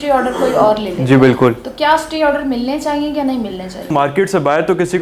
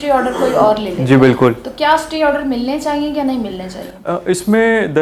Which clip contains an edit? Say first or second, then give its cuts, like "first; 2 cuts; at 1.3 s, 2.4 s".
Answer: first; 1 cut; at 3.9 s